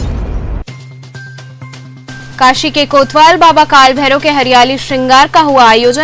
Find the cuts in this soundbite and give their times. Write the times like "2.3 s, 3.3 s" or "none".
1.7 s